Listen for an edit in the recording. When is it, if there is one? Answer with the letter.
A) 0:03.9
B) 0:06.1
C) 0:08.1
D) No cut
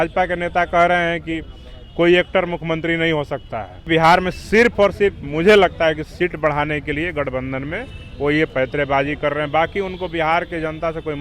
A